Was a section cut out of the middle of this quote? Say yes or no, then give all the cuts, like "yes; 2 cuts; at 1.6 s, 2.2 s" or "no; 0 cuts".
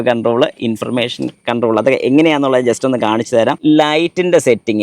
no; 0 cuts